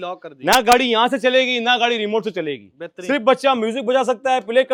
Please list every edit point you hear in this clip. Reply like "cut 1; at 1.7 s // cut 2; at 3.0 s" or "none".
none